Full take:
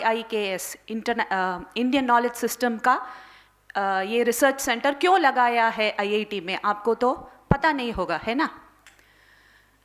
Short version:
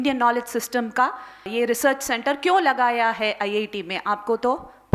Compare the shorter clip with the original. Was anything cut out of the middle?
yes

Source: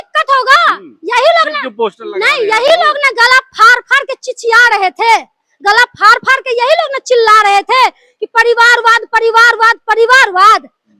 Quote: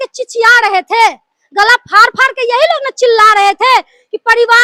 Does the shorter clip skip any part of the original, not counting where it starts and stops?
no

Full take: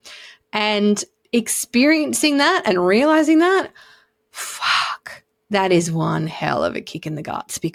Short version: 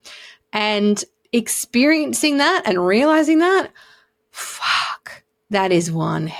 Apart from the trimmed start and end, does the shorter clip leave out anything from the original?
no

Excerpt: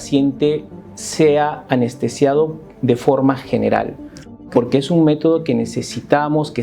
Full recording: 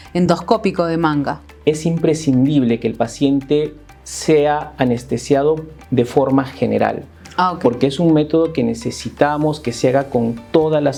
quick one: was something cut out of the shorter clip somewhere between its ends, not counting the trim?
no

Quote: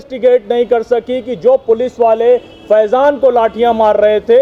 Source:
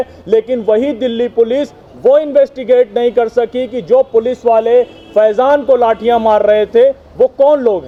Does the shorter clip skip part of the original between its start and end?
no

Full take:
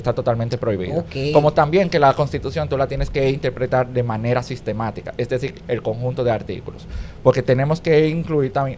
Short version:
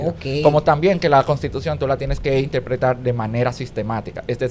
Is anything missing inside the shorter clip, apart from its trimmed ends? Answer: no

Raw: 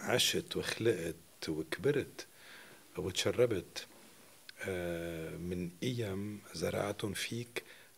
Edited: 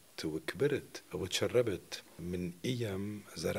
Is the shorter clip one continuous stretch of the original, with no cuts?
no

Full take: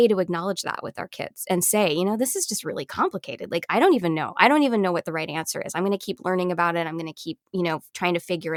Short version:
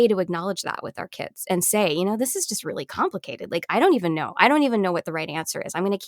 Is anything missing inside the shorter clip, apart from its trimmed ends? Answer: no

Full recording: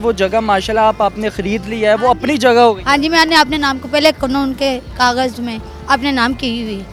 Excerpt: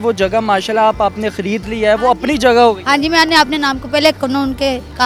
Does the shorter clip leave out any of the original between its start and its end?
no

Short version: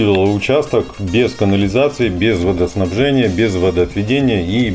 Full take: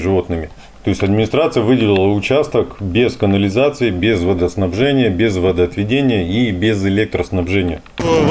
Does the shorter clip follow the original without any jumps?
yes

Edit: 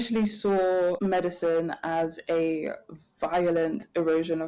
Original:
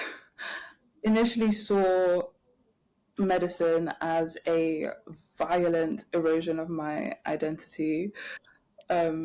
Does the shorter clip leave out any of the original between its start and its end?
yes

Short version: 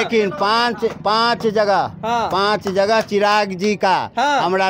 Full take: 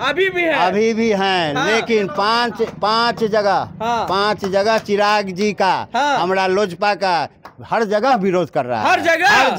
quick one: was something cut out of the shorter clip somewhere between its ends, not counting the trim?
no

